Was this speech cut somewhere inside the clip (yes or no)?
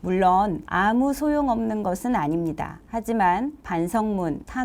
no